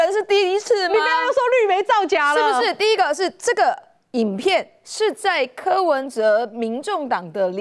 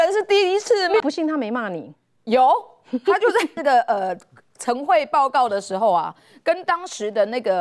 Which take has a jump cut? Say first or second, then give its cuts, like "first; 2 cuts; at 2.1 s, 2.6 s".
second; 2 cuts; at 1.0 s, 3.5 s